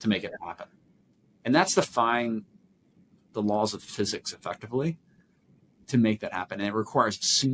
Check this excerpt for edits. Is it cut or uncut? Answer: cut